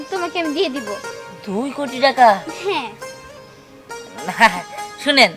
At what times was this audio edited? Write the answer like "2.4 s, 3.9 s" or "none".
none